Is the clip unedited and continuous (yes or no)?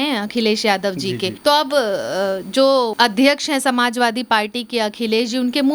yes